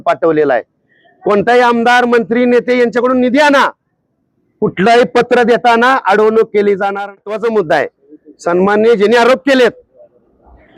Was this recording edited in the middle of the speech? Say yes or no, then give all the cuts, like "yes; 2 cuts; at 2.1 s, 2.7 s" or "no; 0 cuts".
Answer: yes; 1 cut; at 7.2 s